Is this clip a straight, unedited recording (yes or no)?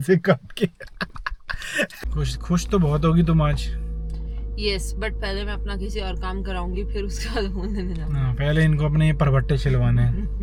yes